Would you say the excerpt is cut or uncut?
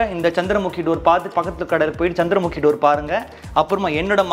uncut